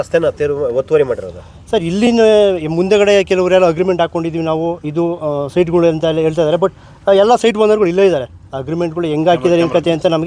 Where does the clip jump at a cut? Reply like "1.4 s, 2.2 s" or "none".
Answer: none

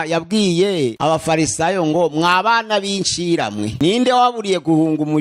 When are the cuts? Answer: 1.0 s, 3.7 s

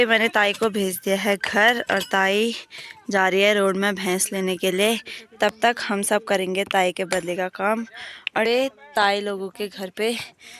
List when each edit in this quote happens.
8.5 s

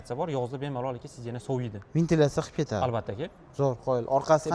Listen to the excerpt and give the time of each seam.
none

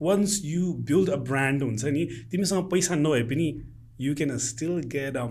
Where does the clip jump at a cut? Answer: none

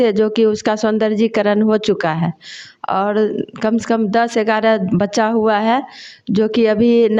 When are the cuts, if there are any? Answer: none

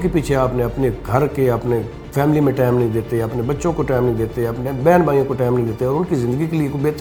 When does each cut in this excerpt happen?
none

